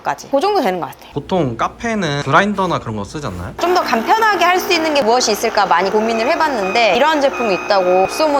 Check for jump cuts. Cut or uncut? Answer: cut